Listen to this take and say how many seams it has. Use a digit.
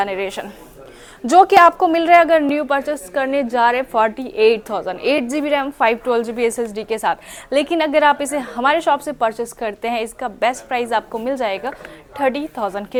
0